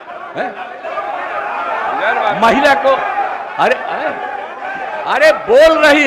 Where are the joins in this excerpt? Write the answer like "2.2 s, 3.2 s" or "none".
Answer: none